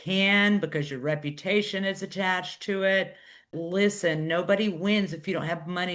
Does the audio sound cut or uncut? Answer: cut